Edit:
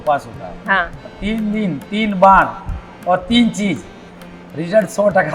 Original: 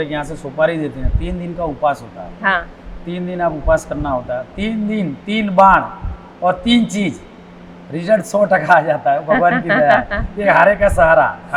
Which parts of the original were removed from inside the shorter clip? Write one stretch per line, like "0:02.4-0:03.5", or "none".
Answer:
0:02.9-0:04.5